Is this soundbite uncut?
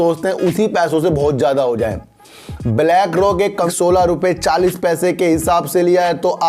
no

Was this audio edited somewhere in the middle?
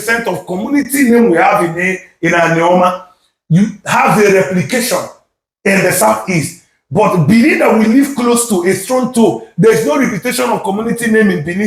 no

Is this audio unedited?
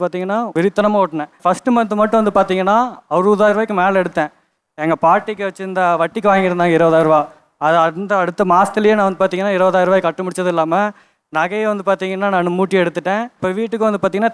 yes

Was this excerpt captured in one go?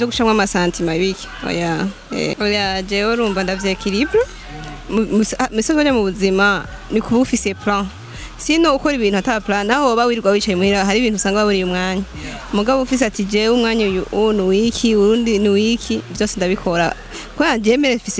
no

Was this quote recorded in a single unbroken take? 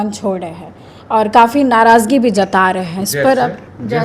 yes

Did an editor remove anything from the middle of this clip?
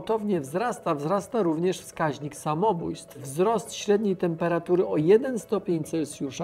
yes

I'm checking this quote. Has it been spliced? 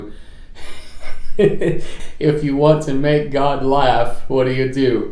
yes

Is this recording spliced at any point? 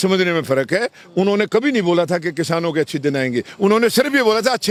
no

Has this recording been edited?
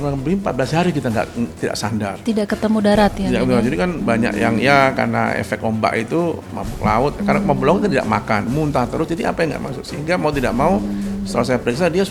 no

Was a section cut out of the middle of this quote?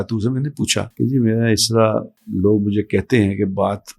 yes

